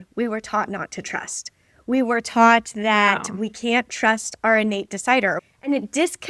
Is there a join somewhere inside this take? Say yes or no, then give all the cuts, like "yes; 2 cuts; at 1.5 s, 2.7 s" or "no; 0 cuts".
yes; 1 cut; at 5.4 s